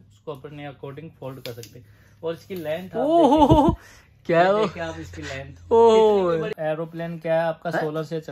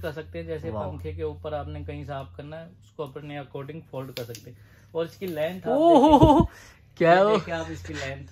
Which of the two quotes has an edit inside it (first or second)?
first